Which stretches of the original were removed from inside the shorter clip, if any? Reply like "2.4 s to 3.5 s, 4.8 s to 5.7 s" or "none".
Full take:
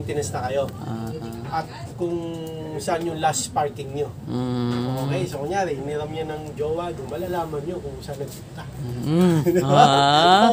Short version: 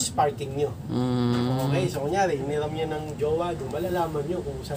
none